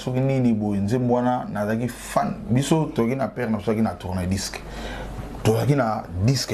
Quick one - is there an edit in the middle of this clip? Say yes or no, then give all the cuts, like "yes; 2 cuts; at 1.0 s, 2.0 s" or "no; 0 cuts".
no; 0 cuts